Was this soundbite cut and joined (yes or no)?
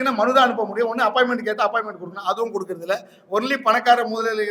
no